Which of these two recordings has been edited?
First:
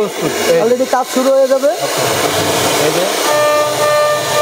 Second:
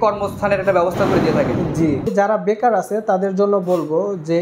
second; 1 cut; at 2.1 s

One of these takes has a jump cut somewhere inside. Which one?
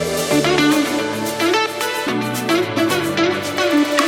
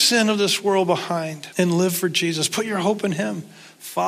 second; 1 cut; at 1.4 s

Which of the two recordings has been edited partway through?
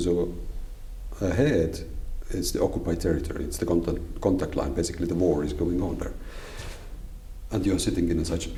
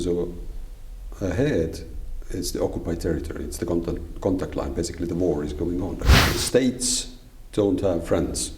second; 1 cut; at 6.2 s

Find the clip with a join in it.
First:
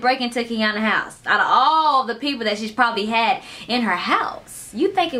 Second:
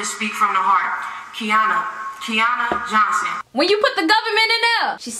second; 1 cut; at 3.4 s

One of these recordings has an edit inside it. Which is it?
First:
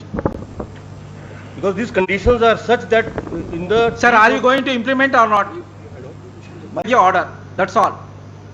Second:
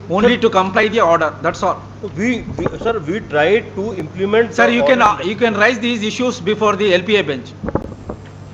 first; 1 cut; at 6.9 s

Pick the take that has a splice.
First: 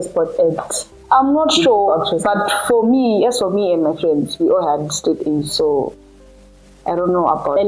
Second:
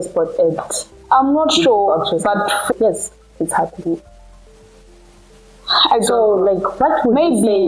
second; 1 cut; at 2.7 s

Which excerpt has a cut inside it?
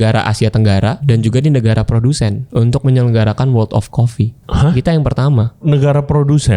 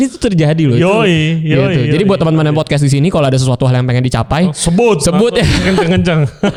first; 4 cuts; at 1.0 s, 2.4 s, 4.4 s, 5.6 s

